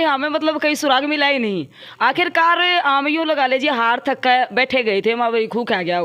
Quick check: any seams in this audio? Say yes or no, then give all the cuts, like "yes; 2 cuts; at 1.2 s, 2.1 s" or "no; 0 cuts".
no; 0 cuts